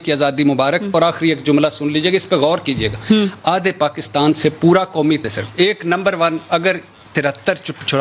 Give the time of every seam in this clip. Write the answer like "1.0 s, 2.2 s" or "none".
5.2 s